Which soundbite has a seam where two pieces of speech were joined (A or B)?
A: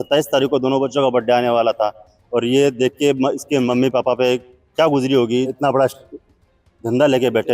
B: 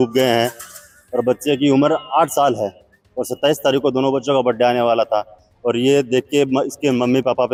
A